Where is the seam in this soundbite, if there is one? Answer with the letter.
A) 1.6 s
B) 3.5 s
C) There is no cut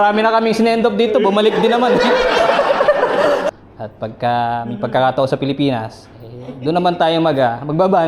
B